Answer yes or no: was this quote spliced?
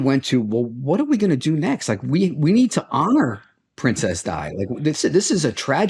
no